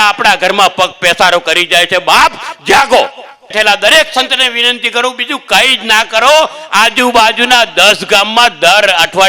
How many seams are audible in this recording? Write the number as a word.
one